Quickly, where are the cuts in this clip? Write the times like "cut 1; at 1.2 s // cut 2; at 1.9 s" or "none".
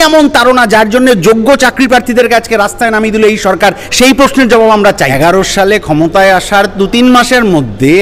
cut 1; at 5.1 s

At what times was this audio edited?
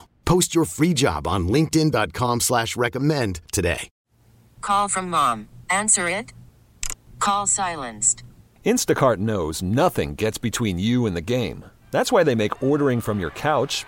cut 1; at 3.9 s

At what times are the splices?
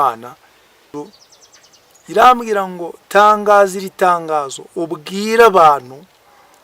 cut 1; at 0.9 s

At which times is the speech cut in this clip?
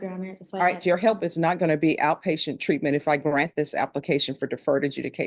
none

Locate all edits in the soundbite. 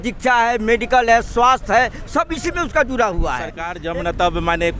cut 1; at 3.7 s

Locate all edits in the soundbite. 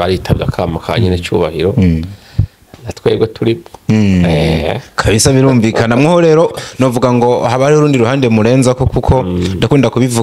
none

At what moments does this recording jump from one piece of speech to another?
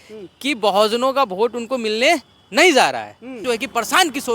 cut 1; at 3.4 s

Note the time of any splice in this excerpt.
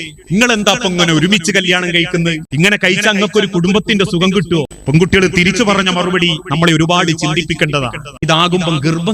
cut 1; at 2.4 s // cut 2; at 4.8 s // cut 3; at 8.1 s

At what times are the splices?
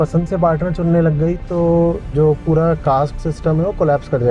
none

